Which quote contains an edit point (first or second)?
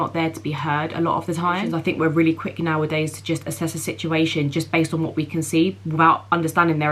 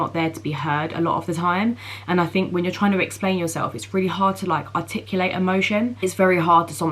first